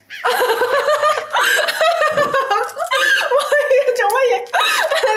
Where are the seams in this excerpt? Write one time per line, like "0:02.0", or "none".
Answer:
none